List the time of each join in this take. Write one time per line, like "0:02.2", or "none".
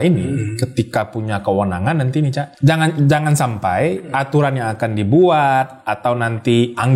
0:02.5